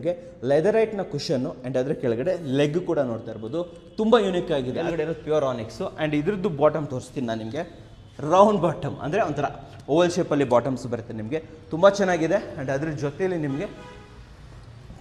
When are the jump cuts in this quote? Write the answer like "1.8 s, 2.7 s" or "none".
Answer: 4.7 s